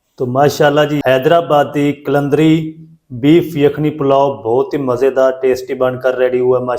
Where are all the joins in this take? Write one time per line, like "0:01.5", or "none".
0:01.0